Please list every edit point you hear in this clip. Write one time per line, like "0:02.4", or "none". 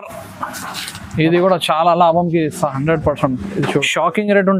0:03.7